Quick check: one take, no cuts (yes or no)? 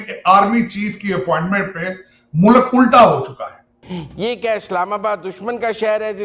no